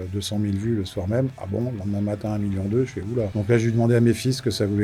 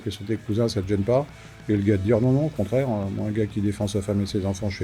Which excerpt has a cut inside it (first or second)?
first